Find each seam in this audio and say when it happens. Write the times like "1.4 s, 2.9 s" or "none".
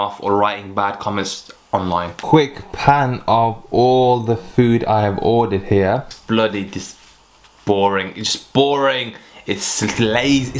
2.2 s, 6.1 s